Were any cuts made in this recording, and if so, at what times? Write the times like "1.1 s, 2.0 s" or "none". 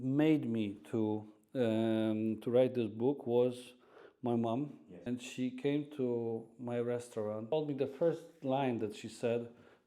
4.8 s, 7.5 s